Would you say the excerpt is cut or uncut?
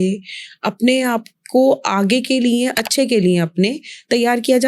cut